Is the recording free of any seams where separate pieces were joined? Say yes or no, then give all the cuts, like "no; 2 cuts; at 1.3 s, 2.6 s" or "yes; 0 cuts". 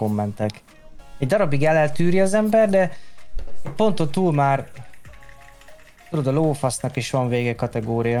yes; 0 cuts